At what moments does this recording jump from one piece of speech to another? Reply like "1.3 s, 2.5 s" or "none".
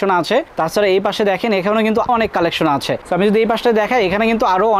2.1 s